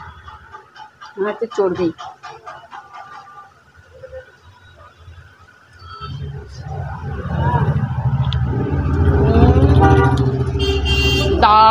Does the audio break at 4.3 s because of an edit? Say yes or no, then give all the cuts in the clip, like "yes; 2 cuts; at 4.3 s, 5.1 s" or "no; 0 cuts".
no; 1 cut; at 6.0 s